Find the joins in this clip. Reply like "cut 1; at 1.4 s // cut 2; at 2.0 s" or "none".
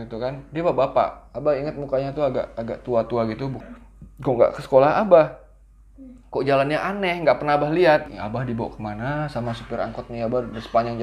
cut 1; at 3.5 s // cut 2; at 8.1 s